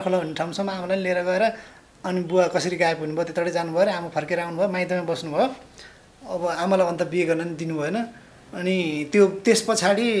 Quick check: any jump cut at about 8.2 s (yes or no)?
no